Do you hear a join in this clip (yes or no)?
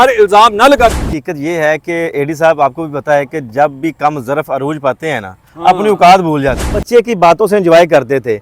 yes